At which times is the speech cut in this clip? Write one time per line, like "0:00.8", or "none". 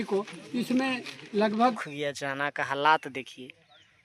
0:01.9